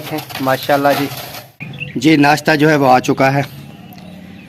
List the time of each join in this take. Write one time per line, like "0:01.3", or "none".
0:01.7